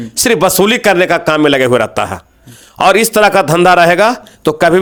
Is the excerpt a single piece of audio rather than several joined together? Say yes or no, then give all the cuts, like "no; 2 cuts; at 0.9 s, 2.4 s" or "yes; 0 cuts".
yes; 0 cuts